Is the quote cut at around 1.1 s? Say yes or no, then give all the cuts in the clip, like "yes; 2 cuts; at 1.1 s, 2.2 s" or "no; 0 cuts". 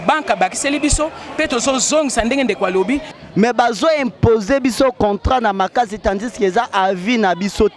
no; 1 cut; at 3.1 s